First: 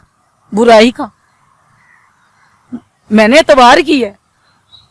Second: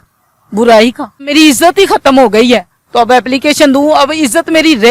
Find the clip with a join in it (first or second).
second